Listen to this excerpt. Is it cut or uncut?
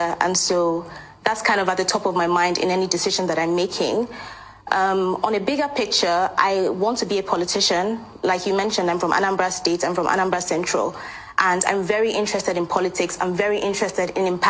uncut